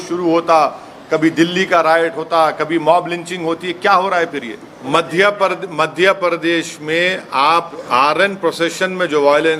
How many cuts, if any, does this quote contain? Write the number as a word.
two